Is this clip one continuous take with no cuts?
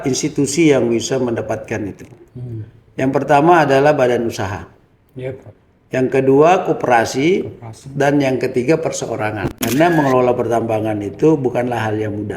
no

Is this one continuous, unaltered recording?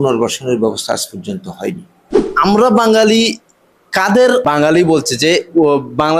no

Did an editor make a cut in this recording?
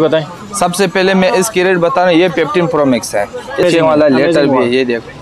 yes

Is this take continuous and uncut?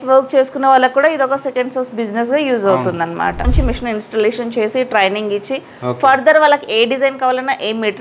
no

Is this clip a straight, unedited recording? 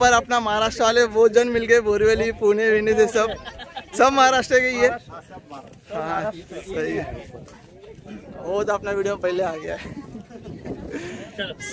yes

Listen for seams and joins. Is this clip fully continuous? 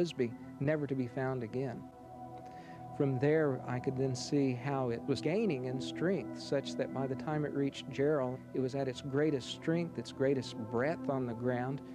yes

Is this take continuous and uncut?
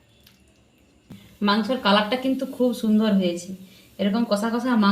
no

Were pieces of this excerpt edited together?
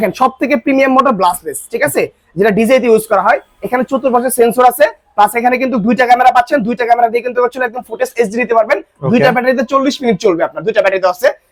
no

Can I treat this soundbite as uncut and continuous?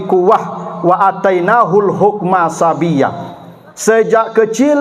yes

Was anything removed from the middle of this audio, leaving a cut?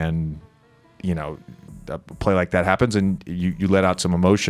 no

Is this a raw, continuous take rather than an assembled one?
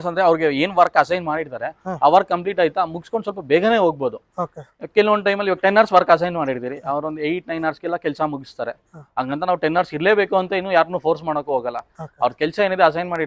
yes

